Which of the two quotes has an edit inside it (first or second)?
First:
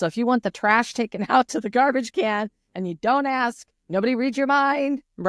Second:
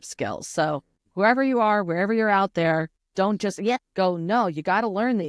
second